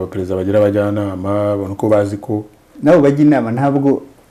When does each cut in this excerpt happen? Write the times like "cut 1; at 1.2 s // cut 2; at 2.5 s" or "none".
none